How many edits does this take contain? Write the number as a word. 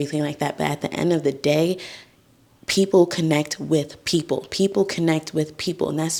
zero